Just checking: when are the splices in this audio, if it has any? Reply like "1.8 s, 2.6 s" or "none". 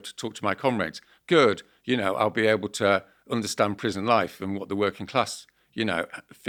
none